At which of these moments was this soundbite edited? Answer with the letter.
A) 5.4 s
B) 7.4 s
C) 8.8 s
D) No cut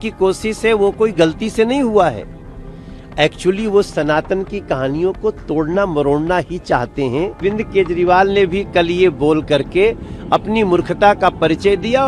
B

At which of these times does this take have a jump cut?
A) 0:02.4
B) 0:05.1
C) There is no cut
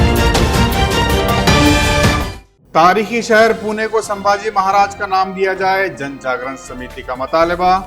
A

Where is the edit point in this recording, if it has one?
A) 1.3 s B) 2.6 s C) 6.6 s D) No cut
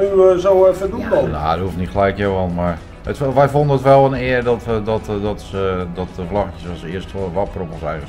D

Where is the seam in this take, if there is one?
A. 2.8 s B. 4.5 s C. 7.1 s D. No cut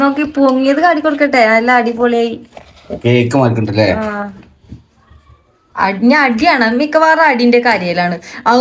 D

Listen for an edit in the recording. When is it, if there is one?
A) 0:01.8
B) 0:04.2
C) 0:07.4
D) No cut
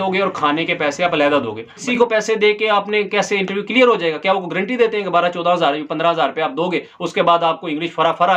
A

